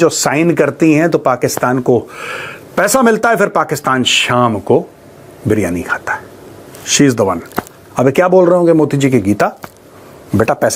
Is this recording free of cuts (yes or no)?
yes